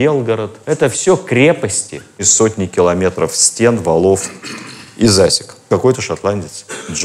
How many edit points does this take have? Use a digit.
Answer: 1